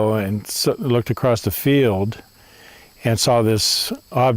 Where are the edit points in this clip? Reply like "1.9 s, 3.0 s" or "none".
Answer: 3.5 s